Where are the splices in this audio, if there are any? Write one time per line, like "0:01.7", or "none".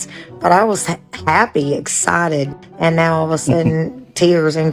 none